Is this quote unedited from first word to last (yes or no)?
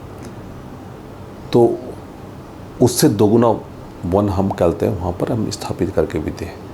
yes